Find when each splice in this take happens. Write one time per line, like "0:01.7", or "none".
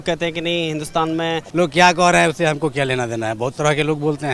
0:01.4